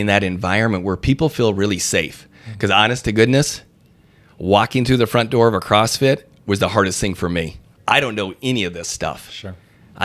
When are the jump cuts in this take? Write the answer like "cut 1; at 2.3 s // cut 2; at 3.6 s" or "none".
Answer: cut 1; at 7.7 s